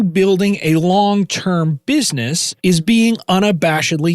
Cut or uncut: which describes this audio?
cut